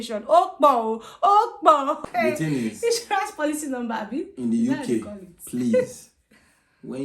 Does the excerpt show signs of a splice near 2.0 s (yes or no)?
yes